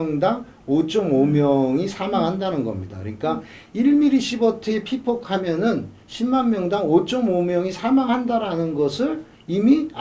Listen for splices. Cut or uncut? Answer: uncut